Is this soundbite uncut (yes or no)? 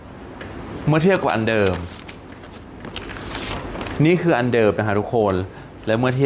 yes